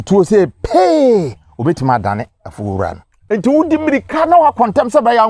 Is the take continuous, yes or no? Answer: no